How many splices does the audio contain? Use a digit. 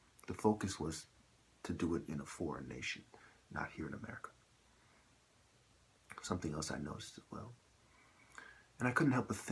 1